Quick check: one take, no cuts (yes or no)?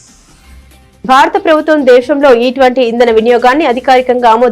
no